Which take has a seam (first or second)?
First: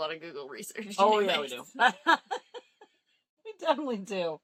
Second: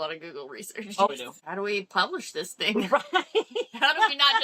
second